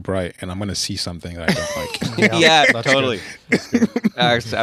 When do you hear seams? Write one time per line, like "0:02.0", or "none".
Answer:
none